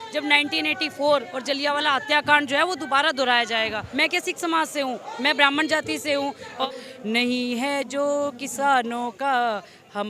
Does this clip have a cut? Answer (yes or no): yes